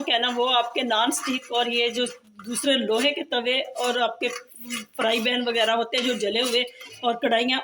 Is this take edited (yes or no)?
no